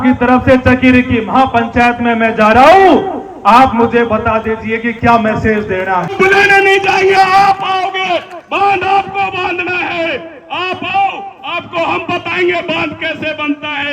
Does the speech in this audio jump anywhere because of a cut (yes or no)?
yes